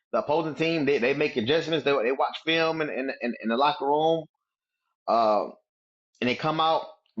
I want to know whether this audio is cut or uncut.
uncut